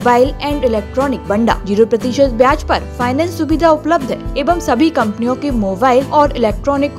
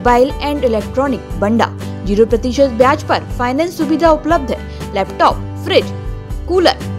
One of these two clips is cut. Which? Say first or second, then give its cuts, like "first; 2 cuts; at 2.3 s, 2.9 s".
first; 3 cuts; at 1.3 s, 4.3 s, 6.1 s